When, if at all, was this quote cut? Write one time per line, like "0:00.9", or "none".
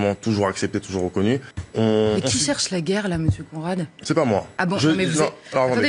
0:01.6
0:04.5